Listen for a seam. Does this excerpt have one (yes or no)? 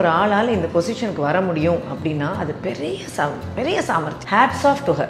yes